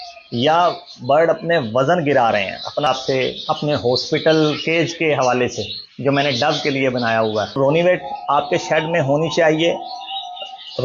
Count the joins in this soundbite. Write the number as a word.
two